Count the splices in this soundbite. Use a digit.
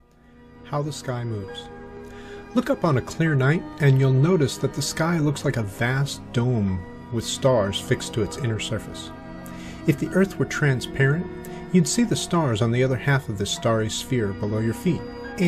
1